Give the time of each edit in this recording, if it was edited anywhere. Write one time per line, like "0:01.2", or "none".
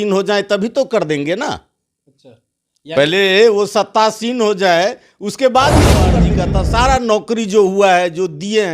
0:06.2